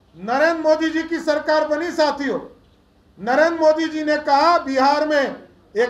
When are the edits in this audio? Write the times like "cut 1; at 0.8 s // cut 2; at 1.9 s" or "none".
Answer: none